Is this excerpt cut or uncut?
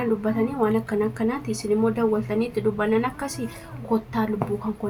uncut